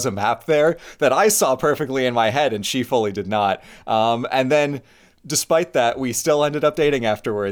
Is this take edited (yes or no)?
no